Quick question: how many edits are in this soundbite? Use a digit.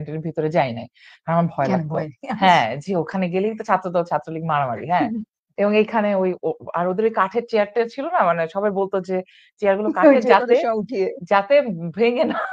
0